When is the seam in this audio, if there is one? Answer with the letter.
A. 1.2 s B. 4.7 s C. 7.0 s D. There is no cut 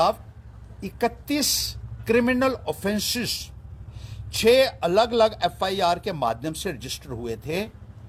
D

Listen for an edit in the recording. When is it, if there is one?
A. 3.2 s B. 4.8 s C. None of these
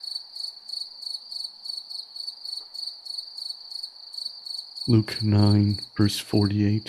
B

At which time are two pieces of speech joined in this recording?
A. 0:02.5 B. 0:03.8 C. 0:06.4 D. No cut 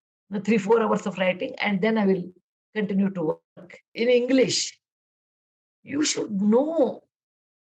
B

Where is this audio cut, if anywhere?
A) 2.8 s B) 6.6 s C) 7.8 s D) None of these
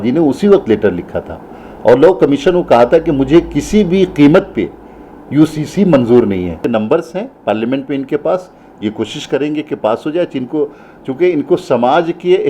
B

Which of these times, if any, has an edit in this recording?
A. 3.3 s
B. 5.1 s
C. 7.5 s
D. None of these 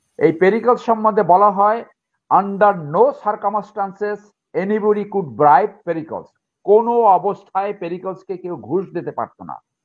D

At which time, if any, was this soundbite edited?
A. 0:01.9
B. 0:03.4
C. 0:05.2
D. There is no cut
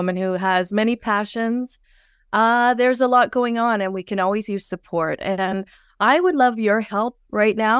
D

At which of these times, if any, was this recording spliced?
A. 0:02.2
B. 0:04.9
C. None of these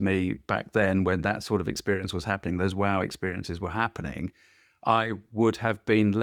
C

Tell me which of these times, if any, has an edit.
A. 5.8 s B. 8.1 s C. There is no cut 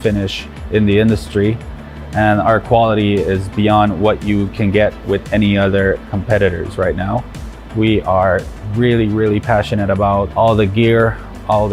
C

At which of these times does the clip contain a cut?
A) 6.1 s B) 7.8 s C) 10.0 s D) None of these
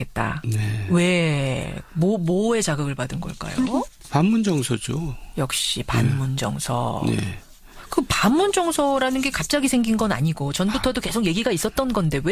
A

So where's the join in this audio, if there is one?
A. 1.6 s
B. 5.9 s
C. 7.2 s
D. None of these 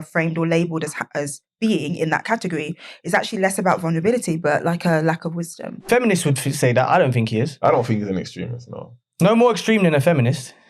B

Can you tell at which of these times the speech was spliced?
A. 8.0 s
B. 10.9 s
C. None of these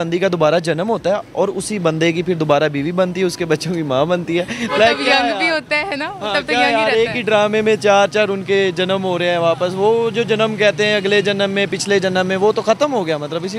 C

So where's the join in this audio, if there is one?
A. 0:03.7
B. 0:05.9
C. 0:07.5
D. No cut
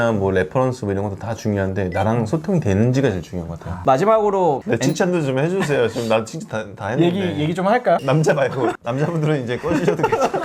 A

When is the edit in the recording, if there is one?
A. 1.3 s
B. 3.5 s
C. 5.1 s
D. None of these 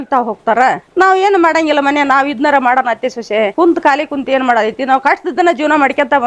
B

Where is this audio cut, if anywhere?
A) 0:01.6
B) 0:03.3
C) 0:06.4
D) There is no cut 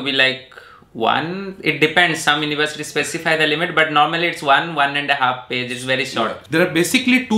C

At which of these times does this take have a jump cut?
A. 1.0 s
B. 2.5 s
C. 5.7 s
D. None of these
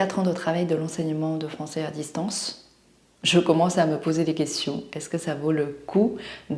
D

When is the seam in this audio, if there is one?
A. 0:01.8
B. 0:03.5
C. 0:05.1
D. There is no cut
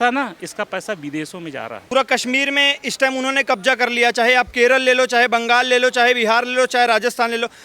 A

